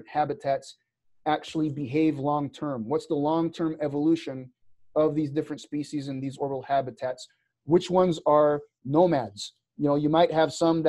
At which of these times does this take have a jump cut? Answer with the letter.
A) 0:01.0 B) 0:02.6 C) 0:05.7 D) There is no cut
D